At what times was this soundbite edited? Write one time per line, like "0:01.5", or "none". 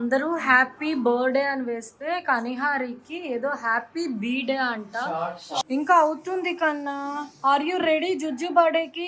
0:05.6